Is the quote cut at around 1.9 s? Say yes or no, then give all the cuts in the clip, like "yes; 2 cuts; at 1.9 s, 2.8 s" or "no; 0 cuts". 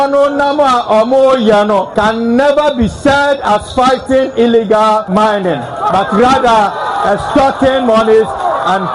yes; 2 cuts; at 1.9 s, 5.1 s